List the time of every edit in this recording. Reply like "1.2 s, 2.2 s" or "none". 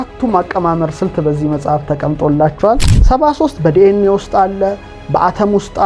2.9 s